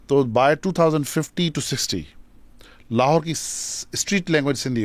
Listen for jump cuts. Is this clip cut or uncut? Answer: uncut